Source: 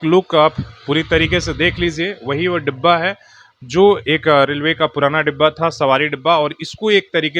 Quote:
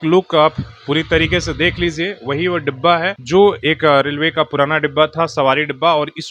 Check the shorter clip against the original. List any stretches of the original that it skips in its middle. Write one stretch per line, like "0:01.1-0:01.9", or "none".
0:03.2-0:03.6